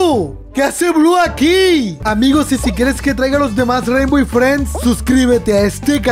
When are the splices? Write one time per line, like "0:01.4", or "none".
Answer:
0:02.0